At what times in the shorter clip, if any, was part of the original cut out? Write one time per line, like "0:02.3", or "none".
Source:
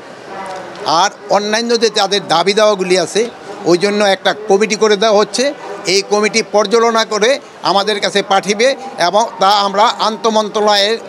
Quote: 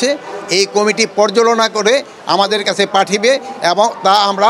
none